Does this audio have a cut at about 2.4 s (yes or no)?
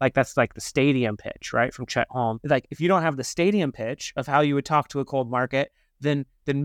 yes